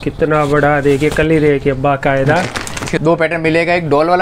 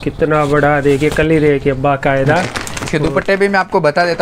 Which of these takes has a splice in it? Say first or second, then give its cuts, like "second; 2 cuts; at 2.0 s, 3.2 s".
first; 1 cut; at 2.9 s